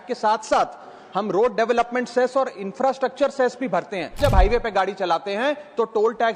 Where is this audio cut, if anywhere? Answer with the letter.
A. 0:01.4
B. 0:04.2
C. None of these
B